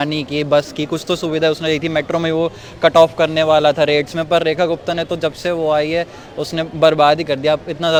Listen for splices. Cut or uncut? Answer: uncut